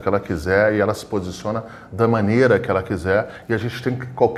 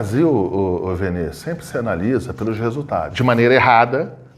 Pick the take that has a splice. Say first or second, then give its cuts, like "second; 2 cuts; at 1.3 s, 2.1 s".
second; 1 cut; at 3.1 s